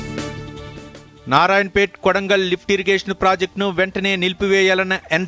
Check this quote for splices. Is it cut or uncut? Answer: cut